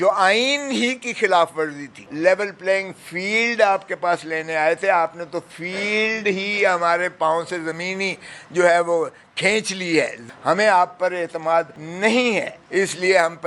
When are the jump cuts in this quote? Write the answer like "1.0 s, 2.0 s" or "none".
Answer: 2.0 s, 10.2 s, 11.8 s, 12.6 s